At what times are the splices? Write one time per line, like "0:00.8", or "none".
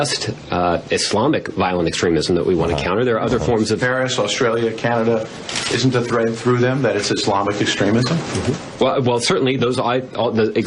0:04.3